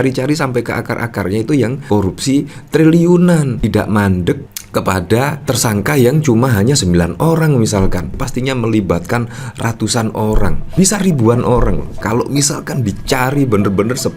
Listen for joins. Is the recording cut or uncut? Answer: cut